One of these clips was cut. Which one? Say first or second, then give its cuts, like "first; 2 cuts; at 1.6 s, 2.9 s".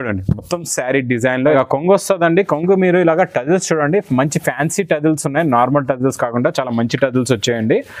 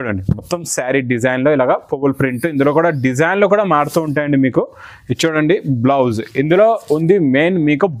first; 1 cut; at 1.6 s